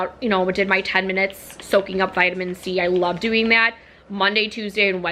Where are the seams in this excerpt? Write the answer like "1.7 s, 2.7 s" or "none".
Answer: none